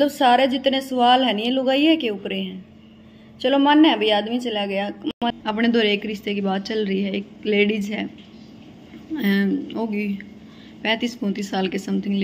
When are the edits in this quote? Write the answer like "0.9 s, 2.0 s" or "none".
5.1 s

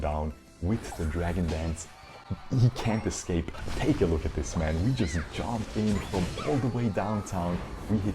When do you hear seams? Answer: 3.6 s

